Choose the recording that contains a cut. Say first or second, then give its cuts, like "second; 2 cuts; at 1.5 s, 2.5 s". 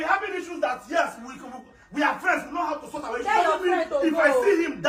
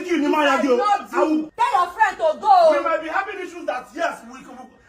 second; 1 cut; at 1.8 s